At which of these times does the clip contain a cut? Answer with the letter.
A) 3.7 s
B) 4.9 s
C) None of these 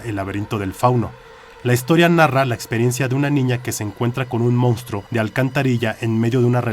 B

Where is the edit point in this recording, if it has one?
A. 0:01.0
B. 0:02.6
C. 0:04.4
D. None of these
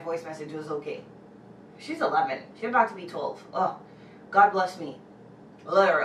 D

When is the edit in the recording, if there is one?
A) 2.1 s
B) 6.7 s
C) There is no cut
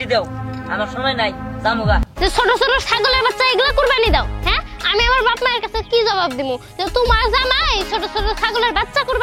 A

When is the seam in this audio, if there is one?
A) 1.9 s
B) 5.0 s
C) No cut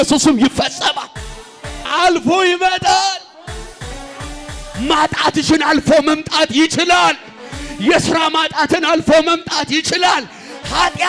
A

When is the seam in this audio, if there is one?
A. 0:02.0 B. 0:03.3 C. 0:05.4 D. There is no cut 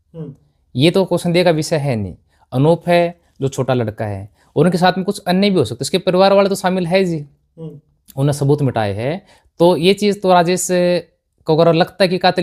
D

